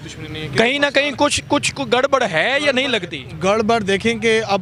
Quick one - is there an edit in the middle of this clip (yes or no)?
no